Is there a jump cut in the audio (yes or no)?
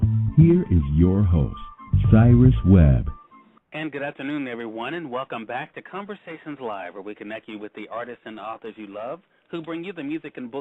yes